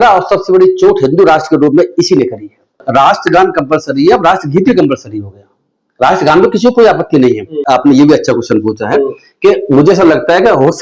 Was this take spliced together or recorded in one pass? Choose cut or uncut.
cut